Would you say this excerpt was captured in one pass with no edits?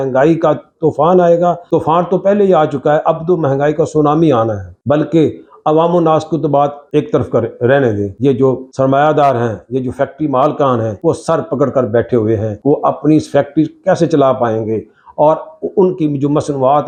yes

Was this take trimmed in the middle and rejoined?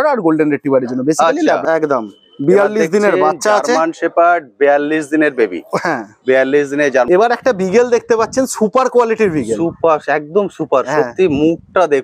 yes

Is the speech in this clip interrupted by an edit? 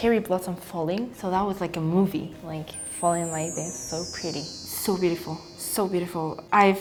no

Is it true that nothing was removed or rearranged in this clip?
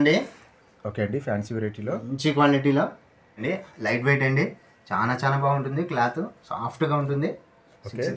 no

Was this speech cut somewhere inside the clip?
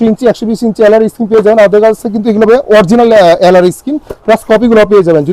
no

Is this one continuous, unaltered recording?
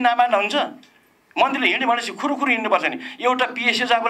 yes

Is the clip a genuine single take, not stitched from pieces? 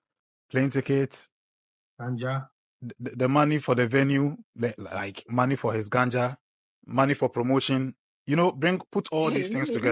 yes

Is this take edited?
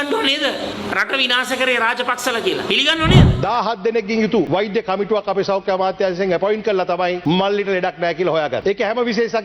yes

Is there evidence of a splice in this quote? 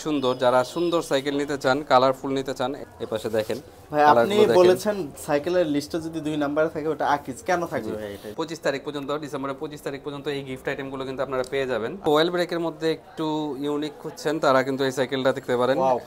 yes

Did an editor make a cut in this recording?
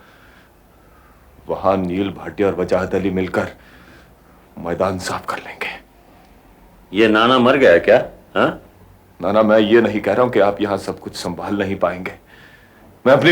no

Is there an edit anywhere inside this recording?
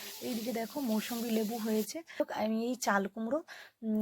yes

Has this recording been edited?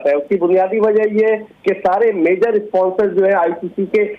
no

